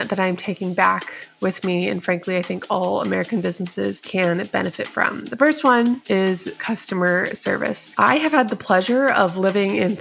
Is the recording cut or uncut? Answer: cut